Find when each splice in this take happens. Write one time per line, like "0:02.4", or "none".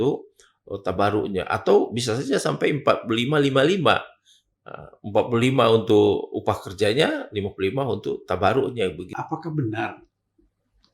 0:09.1